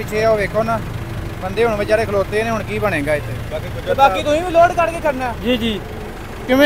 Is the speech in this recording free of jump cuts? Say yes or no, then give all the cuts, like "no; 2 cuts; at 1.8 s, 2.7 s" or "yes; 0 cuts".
yes; 0 cuts